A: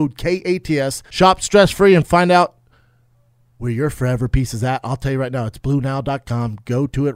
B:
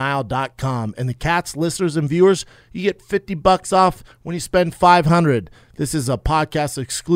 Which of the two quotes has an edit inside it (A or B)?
A